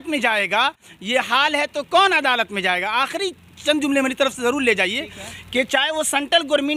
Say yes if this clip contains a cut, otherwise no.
no